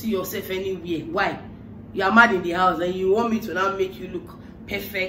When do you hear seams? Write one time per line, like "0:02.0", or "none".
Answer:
none